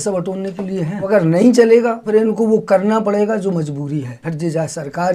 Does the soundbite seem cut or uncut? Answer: cut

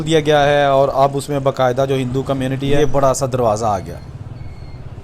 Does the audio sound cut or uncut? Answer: cut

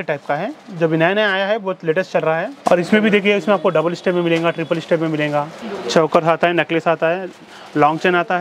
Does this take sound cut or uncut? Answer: cut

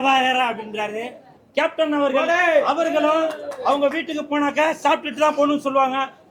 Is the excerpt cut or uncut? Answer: cut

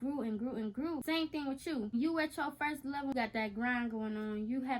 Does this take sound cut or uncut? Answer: cut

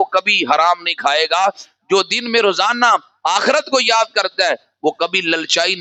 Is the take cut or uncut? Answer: uncut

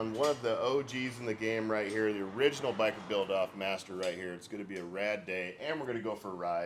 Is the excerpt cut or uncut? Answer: uncut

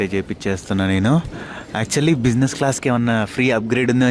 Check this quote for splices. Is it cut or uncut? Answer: uncut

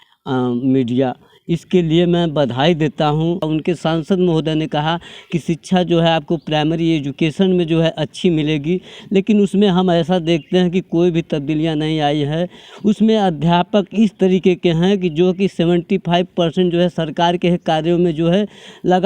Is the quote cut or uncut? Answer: cut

